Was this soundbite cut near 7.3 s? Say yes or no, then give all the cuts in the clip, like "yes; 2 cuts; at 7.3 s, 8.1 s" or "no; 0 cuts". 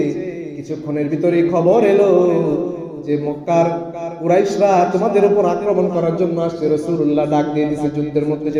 no; 0 cuts